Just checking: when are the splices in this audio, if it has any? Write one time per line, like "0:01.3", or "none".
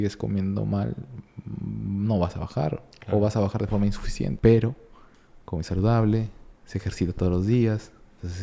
0:04.3